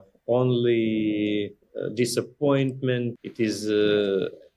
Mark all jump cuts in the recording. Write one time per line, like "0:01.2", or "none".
0:03.2